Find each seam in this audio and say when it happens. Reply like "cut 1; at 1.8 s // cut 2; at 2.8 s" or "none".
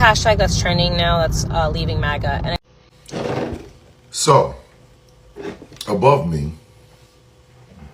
cut 1; at 2.6 s